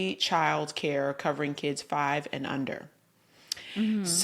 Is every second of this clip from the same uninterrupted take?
yes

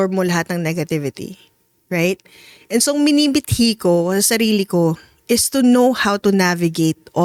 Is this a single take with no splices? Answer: yes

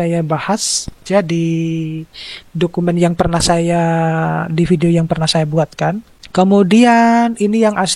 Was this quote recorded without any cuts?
no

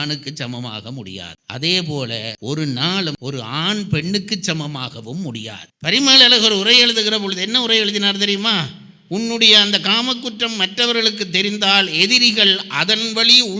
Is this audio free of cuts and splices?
no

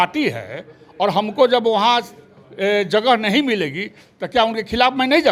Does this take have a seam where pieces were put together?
no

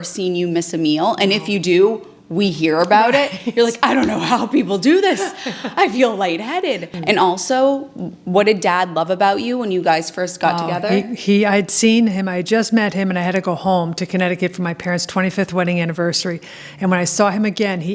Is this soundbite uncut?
no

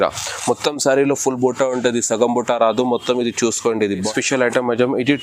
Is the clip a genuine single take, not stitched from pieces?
no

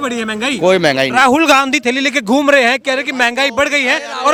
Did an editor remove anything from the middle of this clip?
no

